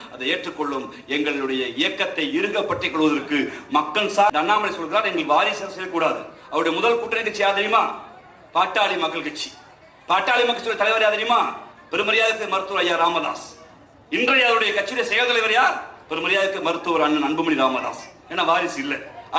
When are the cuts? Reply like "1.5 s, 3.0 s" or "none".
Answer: 4.3 s